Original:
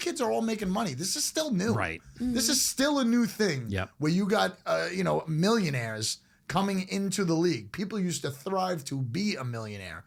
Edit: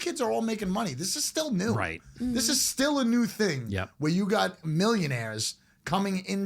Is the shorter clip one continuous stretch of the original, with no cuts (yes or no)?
no